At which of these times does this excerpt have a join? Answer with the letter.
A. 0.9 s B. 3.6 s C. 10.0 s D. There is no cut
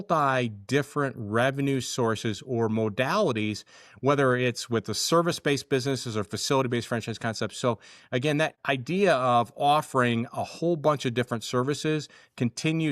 D